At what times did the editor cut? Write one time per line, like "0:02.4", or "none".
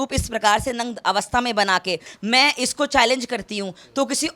0:02.1